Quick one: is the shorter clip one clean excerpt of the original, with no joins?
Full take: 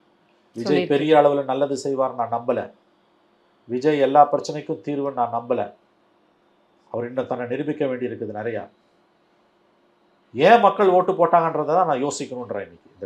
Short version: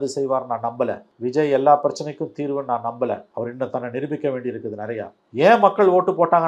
no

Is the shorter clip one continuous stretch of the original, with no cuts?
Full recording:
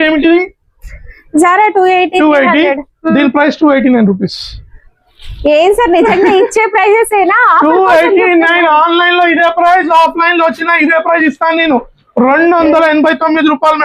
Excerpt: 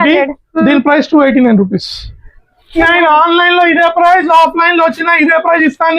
no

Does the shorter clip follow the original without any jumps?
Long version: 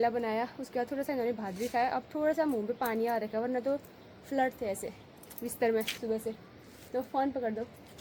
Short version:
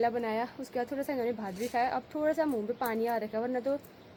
yes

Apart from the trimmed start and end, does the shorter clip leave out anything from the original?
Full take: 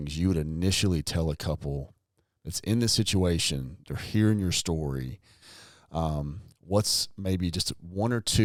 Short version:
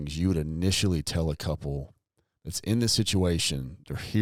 no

